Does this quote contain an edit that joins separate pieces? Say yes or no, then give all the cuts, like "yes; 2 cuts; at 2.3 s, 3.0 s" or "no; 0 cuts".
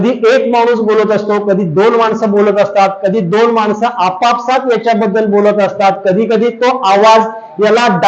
no; 0 cuts